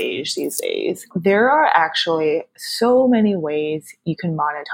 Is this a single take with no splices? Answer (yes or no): no